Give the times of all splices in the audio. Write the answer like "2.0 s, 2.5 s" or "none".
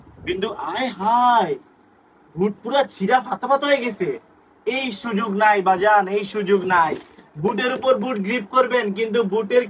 none